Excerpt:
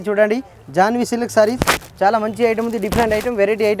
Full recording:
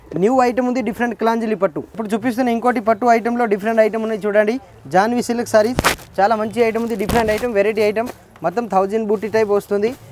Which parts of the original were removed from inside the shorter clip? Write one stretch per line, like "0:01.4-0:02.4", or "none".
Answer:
none